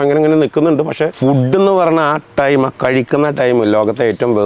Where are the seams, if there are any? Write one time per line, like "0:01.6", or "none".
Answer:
0:01.1